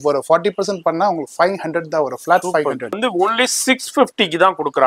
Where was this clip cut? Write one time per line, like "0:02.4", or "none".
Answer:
0:03.0